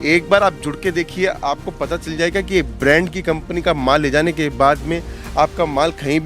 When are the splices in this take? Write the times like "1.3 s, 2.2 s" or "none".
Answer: none